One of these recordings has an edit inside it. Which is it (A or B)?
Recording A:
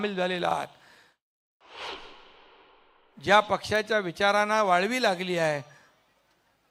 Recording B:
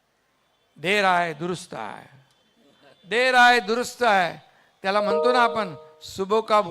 B